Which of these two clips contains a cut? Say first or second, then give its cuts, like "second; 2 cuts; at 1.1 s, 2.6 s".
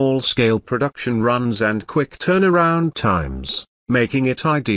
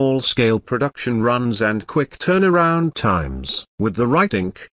first; 1 cut; at 3.7 s